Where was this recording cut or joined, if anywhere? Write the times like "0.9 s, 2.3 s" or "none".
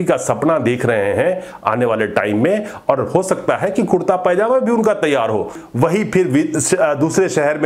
5.6 s